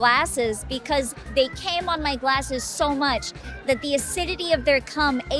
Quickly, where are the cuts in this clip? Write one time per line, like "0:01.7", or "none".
0:01.2